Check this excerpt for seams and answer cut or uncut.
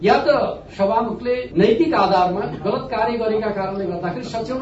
uncut